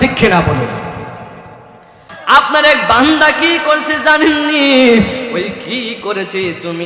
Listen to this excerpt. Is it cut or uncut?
cut